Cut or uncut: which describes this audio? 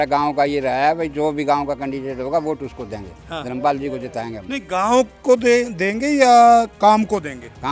uncut